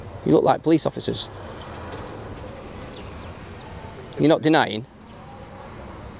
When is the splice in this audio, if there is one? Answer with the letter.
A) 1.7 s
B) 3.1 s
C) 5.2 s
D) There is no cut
D